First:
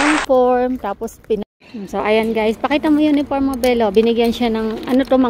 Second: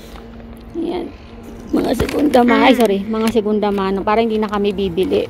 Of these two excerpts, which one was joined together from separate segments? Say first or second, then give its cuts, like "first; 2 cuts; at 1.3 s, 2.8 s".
first; 1 cut; at 1.4 s